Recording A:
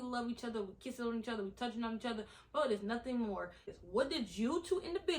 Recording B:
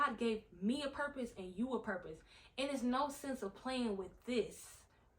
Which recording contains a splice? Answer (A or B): A